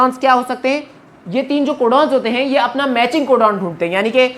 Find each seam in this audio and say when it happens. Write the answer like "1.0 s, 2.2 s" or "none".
none